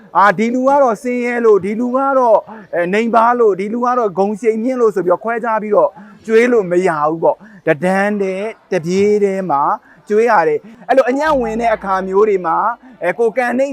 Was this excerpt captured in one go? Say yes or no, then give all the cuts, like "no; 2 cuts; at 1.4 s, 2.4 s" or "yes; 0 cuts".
no; 1 cut; at 10.7 s